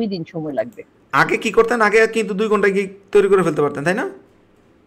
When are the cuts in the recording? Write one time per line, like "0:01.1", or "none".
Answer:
none